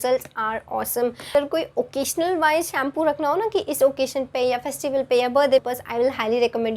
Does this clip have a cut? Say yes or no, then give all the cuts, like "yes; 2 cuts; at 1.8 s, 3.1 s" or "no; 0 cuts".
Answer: yes; 2 cuts; at 1.3 s, 5.6 s